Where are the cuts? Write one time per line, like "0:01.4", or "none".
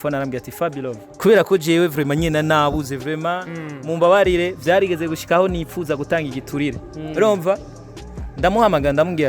0:01.1